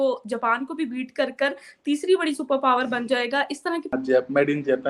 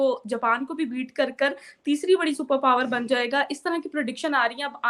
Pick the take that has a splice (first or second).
first